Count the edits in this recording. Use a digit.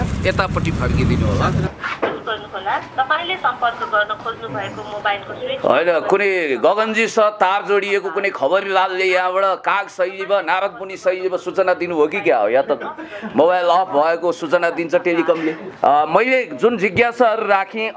2